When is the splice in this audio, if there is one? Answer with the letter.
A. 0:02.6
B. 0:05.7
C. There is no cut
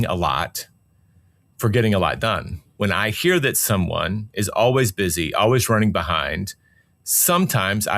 A